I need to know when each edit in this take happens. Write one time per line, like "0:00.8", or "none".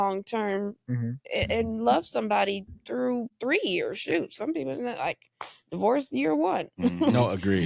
0:03.3